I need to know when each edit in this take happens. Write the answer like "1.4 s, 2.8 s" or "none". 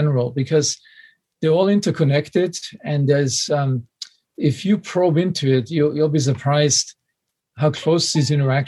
none